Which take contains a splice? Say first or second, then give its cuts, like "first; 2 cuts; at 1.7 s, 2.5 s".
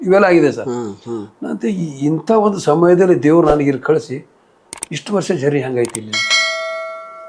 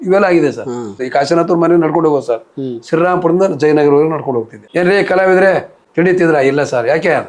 second; 3 cuts; at 1.0 s, 4.6 s, 5.8 s